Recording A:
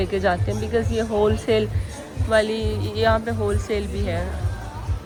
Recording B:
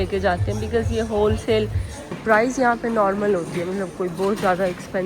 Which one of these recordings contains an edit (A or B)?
B